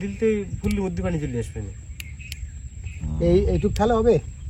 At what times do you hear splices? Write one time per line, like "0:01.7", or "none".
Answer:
none